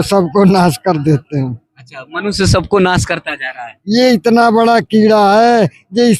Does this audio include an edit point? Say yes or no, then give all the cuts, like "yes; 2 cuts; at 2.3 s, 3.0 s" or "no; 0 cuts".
no; 0 cuts